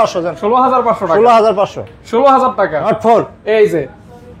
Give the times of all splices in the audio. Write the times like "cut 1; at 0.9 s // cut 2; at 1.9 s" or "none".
cut 1; at 2.8 s